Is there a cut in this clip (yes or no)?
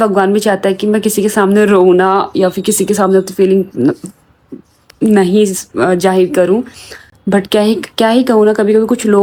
no